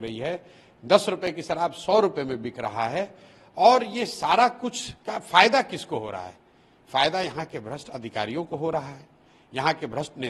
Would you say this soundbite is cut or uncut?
uncut